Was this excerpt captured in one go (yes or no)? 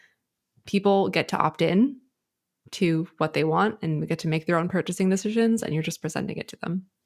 yes